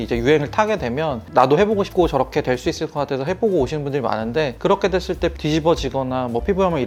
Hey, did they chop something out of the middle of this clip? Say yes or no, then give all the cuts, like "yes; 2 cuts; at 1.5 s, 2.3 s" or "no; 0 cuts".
no; 0 cuts